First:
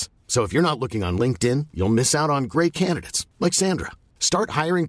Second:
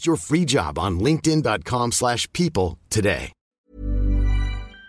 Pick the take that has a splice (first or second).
second